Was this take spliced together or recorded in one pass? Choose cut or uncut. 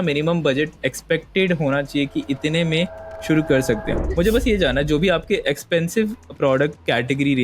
cut